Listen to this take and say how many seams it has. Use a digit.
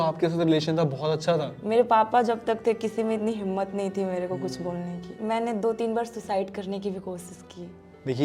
1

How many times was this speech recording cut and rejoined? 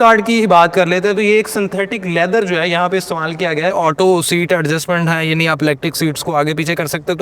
1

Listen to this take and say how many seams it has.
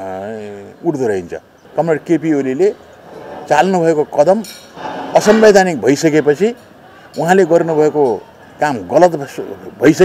1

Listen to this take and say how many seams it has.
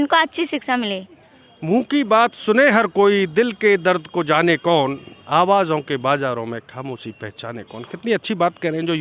0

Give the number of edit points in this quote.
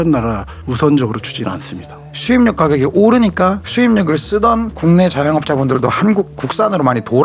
1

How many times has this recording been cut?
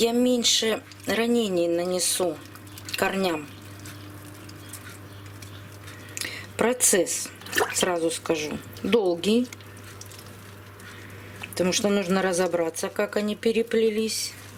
0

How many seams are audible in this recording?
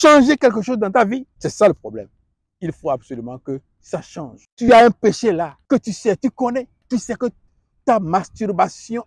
4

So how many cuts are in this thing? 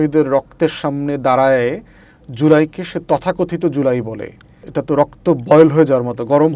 1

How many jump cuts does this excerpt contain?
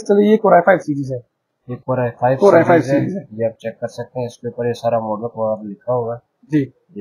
0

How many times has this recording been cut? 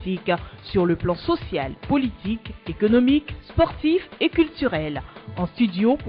0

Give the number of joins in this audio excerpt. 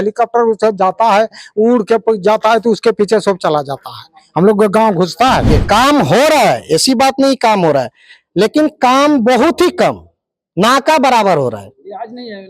1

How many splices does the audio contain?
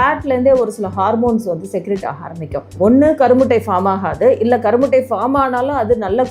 1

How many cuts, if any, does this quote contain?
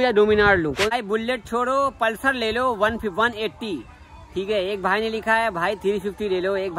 1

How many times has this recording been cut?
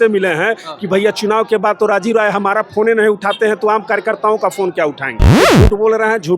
1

